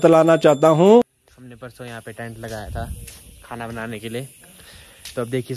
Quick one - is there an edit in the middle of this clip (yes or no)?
yes